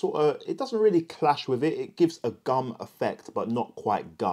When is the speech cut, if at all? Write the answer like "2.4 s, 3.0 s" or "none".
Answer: none